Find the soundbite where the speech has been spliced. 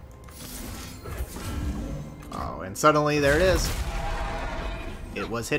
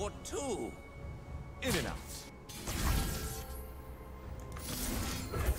second; 1 cut; at 2.3 s

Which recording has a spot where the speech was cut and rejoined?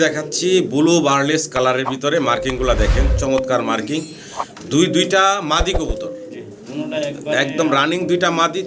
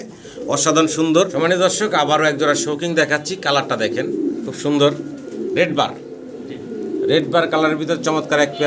second; 1 cut; at 1.3 s

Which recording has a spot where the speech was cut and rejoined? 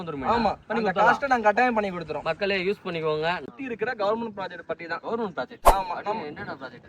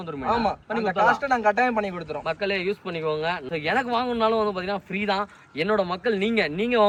first; 1 cut; at 3.4 s

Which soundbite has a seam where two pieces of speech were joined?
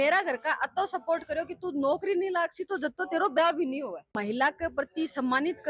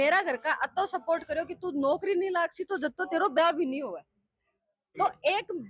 first; 1 cut; at 4.2 s

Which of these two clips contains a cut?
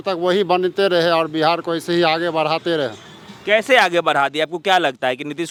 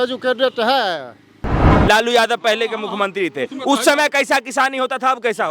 second; 1 cut; at 1.7 s

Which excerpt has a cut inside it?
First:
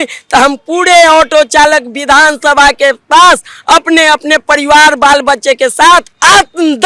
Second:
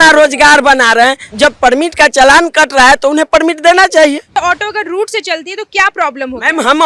second; 2 cuts; at 1.3 s, 4.3 s

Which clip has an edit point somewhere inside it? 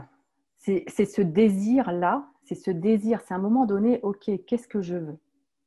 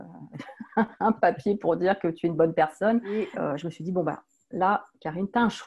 second; 1 cut; at 3.3 s

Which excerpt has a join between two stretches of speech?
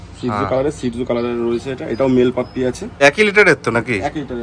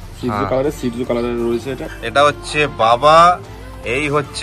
second; 1 cut; at 1.8 s

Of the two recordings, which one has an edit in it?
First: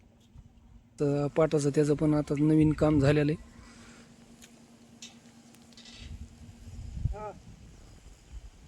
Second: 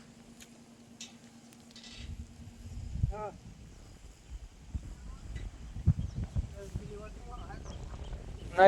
first; 1 cut; at 1.0 s

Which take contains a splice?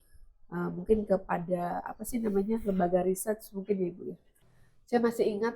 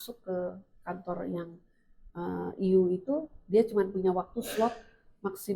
first; 1 cut; at 4.3 s

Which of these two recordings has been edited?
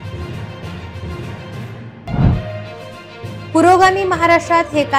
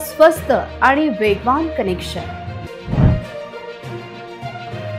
first; 1 cut; at 0.9 s

